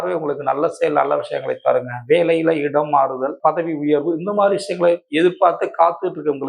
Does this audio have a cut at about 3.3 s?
yes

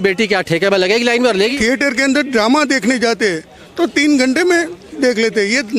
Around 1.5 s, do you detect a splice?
yes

